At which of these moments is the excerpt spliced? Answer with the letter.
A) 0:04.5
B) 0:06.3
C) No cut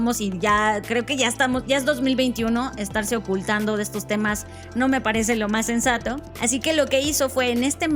B